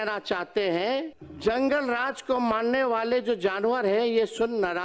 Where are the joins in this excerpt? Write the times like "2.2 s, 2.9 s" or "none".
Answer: 1.2 s